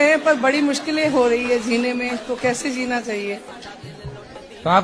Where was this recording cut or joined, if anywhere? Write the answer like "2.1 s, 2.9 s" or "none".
none